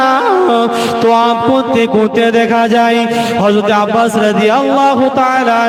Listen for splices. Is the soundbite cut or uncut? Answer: uncut